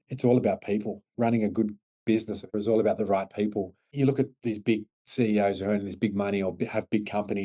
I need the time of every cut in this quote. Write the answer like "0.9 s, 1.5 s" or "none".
1.1 s, 2.5 s, 3.8 s, 5.0 s